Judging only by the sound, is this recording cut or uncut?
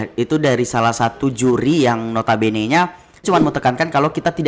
cut